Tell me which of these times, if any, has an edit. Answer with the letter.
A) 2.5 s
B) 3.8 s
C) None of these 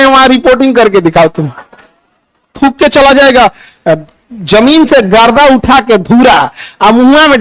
A